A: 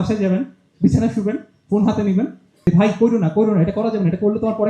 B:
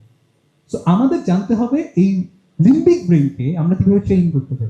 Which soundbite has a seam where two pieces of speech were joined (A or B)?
A